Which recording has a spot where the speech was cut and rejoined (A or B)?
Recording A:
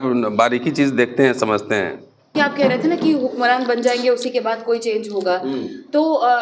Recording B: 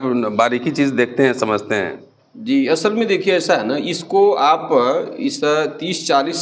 A